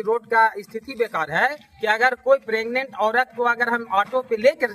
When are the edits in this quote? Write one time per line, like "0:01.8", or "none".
none